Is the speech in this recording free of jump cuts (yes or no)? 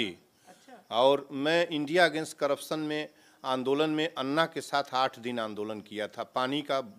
yes